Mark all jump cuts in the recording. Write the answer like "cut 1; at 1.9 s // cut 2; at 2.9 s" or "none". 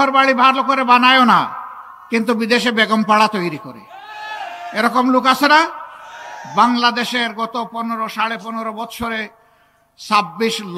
none

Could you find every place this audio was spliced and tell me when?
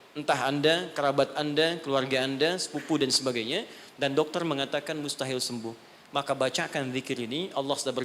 none

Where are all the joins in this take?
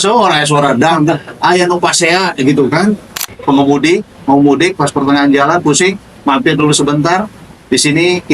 cut 1; at 3.3 s

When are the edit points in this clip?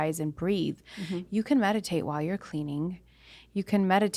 none

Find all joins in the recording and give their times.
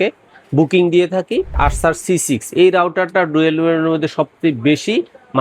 cut 1; at 1.5 s

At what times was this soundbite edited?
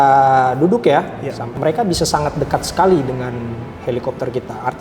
cut 1; at 1.5 s

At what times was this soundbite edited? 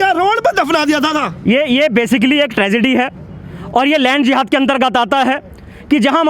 none

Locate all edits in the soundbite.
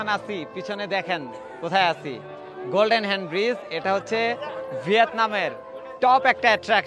none

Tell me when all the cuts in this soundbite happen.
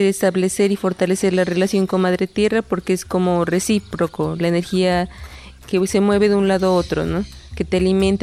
none

